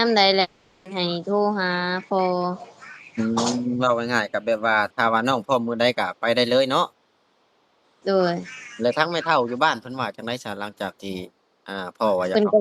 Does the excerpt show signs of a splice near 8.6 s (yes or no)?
no